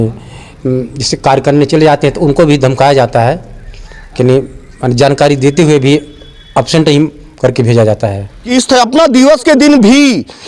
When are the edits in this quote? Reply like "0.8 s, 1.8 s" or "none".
8.3 s